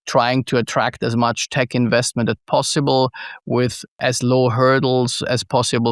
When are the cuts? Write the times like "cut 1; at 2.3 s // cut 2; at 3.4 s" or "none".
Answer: none